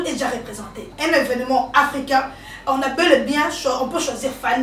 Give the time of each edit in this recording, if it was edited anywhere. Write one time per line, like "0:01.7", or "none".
0:00.9